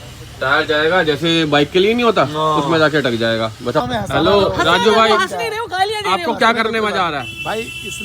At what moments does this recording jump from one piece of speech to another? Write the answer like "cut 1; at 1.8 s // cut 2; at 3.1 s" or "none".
cut 1; at 3.8 s